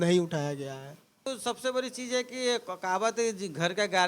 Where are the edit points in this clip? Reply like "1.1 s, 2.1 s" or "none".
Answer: 1.3 s